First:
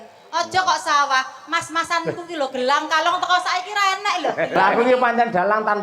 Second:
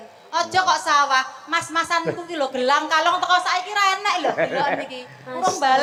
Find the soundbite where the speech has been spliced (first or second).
first